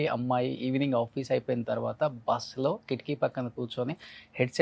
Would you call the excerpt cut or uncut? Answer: uncut